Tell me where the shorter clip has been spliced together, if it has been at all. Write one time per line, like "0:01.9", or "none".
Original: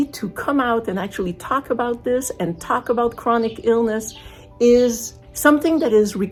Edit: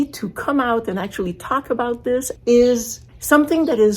0:02.3